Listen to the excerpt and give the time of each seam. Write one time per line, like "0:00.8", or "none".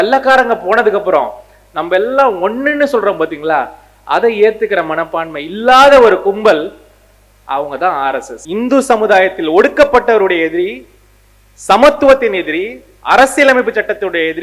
0:08.4